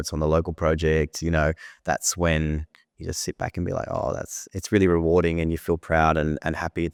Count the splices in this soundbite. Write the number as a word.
zero